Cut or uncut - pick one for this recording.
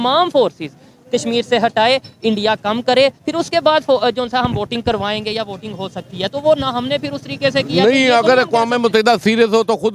uncut